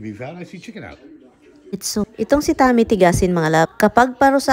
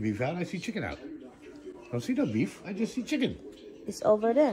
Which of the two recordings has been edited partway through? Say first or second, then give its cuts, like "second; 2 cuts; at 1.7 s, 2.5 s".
first; 1 cut; at 1.8 s